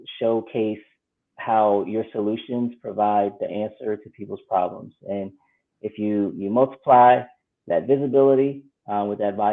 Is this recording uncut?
yes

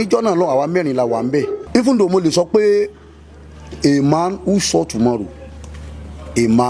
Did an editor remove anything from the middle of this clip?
yes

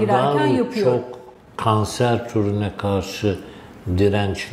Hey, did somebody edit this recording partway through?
no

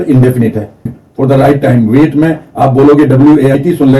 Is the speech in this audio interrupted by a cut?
yes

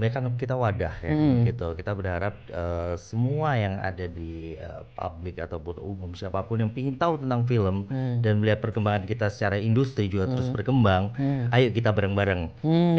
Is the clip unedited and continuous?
yes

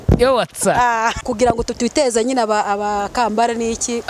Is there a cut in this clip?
yes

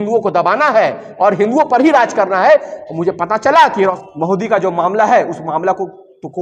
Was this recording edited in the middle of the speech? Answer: yes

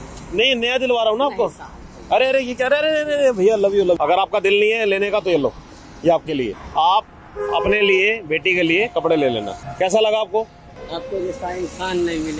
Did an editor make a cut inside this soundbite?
yes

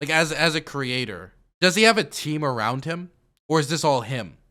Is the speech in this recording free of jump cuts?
yes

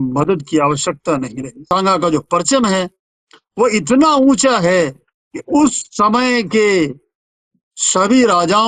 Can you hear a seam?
yes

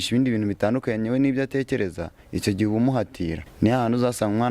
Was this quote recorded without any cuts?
no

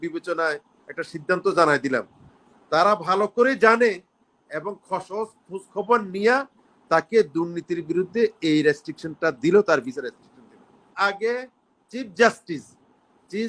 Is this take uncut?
no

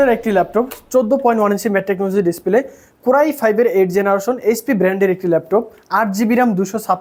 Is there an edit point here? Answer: no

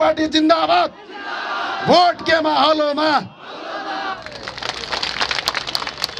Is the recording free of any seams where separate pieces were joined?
no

